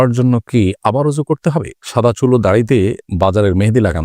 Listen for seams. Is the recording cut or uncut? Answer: cut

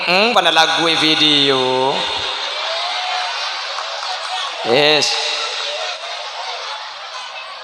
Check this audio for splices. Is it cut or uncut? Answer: uncut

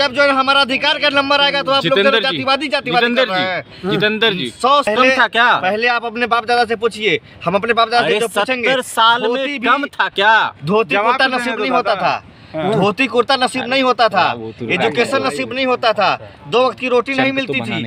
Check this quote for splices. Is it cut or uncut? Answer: cut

